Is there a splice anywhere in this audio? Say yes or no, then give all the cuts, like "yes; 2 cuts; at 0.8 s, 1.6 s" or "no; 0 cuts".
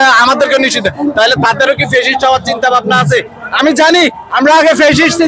no; 0 cuts